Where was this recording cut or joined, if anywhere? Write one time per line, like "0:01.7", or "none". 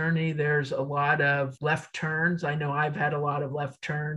0:01.5